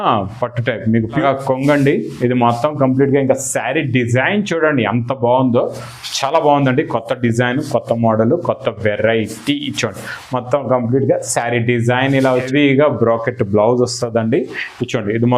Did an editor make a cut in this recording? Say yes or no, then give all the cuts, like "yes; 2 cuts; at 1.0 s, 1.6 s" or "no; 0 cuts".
yes; 2 cuts; at 1.2 s, 12.3 s